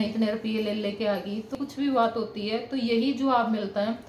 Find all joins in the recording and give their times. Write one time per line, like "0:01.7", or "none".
0:01.5